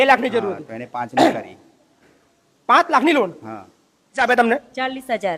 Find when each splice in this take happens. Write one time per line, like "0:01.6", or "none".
0:04.2